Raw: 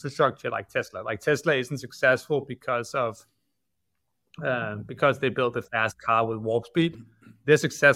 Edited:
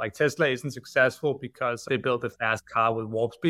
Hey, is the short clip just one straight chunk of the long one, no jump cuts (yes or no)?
no